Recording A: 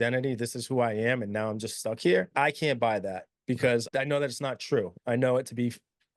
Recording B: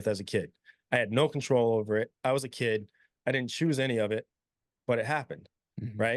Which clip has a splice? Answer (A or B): A